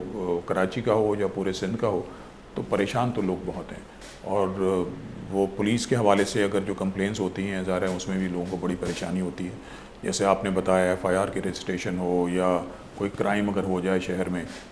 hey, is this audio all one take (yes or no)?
yes